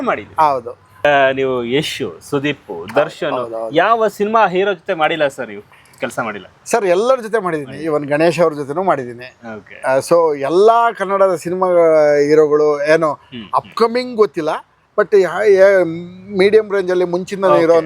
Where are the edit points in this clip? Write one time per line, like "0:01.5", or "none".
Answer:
0:01.0